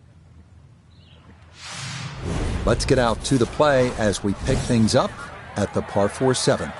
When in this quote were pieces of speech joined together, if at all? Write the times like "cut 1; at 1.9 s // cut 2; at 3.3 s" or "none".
cut 1; at 1.6 s